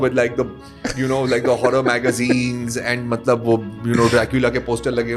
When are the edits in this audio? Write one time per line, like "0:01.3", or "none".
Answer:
none